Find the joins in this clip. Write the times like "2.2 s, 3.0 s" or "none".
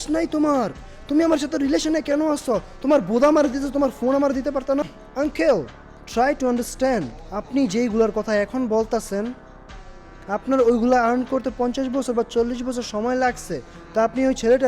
5.0 s